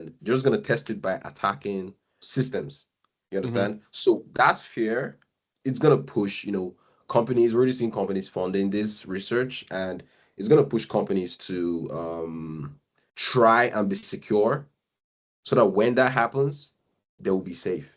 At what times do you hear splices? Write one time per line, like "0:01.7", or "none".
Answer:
none